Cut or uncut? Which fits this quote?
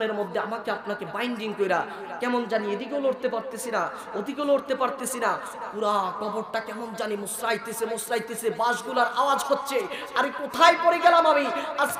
uncut